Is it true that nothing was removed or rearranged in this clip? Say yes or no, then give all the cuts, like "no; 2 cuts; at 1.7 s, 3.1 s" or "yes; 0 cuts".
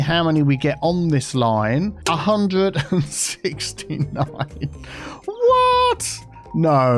no; 1 cut; at 2.0 s